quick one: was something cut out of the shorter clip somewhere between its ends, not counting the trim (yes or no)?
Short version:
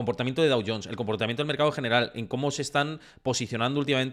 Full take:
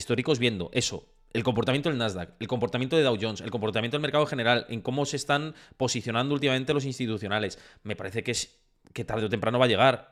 no